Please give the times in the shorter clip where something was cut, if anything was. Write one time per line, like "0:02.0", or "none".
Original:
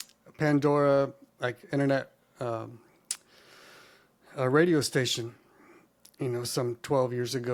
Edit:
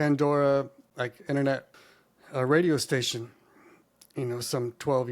0:01.8